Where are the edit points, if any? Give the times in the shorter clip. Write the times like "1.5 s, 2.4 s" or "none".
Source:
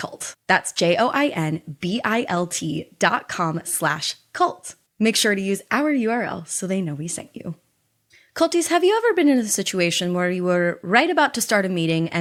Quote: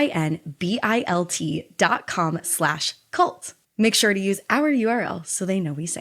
none